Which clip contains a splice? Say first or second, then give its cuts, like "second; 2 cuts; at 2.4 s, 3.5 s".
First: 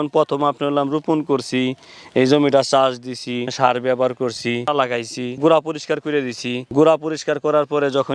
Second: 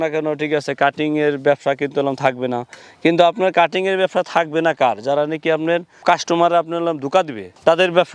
first; 2 cuts; at 3.5 s, 5.1 s